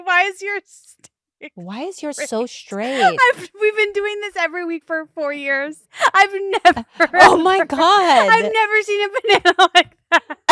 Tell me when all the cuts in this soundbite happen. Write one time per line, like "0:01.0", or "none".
none